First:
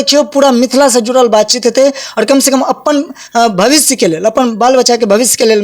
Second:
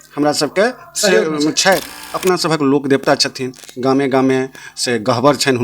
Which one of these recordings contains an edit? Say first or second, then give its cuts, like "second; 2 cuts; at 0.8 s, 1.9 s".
second; 1 cut; at 1.9 s